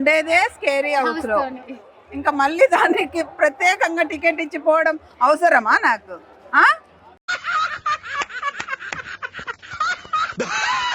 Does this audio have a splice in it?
no; 0 cuts

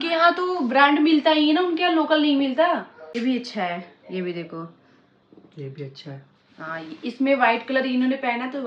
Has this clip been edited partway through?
yes; 1 cut; at 3.2 s

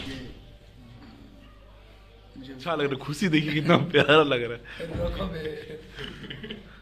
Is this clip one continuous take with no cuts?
no; 1 cut; at 2.6 s

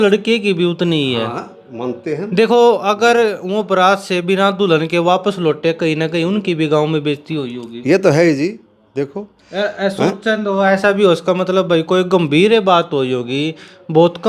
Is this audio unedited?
yes; 0 cuts

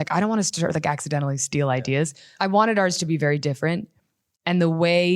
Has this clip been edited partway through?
yes; 1 cut; at 2.2 s

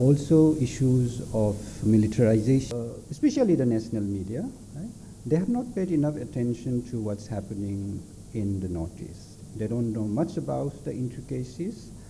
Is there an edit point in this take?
yes; 1 cut; at 2.7 s

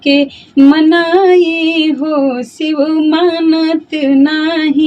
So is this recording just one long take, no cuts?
yes; 0 cuts

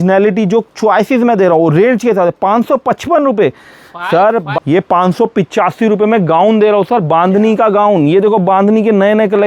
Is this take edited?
yes; 1 cut; at 4.5 s

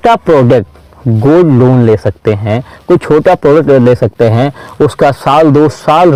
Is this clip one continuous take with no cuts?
yes; 0 cuts

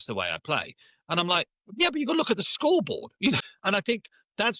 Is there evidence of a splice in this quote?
yes; 1 cut; at 3.4 s

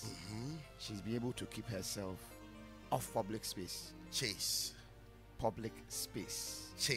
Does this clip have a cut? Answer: no; 0 cuts

